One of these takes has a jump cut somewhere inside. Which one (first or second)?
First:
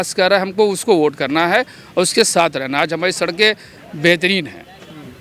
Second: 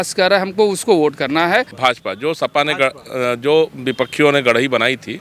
second